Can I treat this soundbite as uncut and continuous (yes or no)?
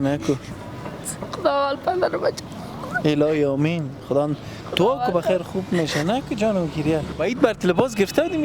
no